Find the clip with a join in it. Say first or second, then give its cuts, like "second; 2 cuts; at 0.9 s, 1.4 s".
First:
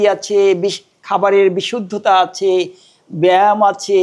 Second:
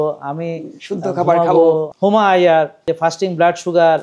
second; 2 cuts; at 1.9 s, 2.9 s